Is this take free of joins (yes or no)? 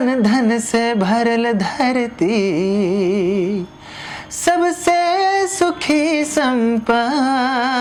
yes